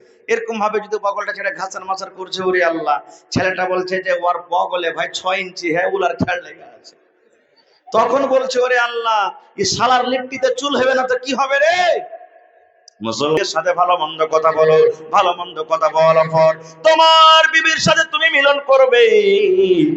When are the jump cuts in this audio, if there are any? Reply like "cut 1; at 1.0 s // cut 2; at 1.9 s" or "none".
cut 1; at 13.4 s